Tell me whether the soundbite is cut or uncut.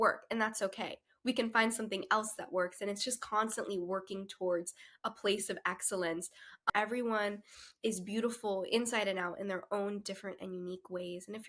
cut